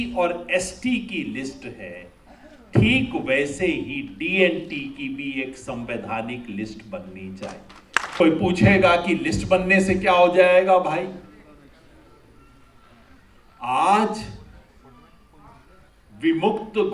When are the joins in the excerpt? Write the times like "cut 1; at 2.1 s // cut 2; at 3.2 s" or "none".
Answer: cut 1; at 8.2 s